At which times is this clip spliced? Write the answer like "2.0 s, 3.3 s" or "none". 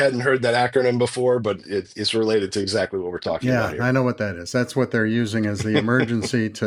none